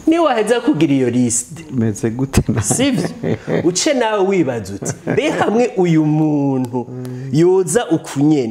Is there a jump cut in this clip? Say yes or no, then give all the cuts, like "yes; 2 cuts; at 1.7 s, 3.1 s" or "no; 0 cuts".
no; 0 cuts